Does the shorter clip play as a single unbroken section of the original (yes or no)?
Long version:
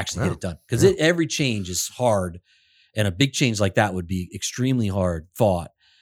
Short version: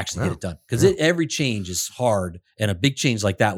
no